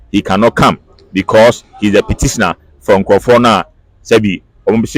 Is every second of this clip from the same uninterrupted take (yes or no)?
yes